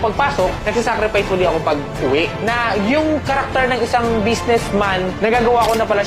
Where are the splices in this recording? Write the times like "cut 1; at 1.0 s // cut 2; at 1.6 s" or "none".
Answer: none

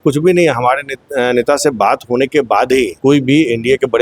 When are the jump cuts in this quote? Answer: cut 1; at 2.9 s

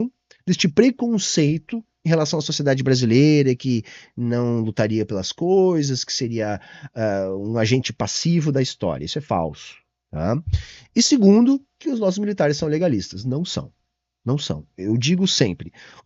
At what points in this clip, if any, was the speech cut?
none

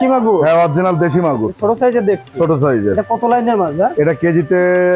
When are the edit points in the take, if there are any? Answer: none

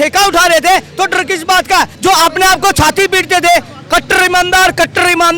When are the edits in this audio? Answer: none

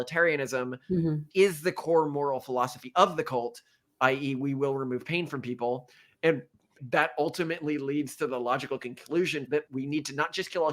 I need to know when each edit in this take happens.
cut 1; at 1.3 s // cut 2; at 6.7 s // cut 3; at 9.6 s

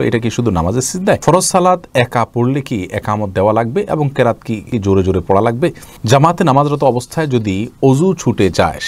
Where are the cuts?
cut 1; at 1.2 s // cut 2; at 4.7 s // cut 3; at 5.9 s

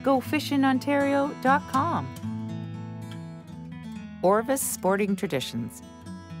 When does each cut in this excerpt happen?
none

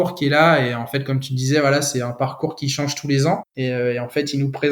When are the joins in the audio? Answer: cut 1; at 3.5 s

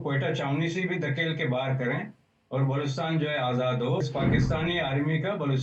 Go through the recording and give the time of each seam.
cut 1; at 4.0 s

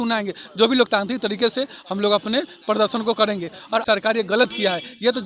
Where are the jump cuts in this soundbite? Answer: cut 1; at 3.8 s

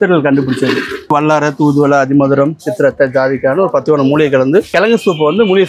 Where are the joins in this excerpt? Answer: cut 1; at 1.1 s // cut 2; at 4.7 s

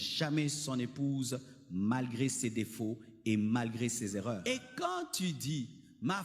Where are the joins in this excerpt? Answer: cut 1; at 4.4 s

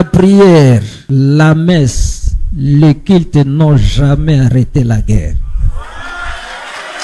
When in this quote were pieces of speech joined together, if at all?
cut 1; at 1.0 s

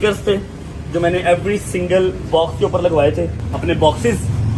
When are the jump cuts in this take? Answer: cut 1; at 3.4 s

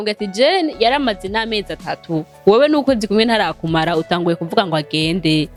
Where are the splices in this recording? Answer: none

